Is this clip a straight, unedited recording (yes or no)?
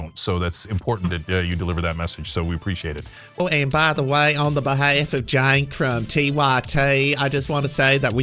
no